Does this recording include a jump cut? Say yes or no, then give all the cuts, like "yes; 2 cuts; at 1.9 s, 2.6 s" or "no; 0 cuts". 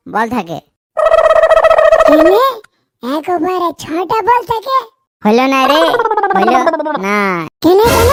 no; 0 cuts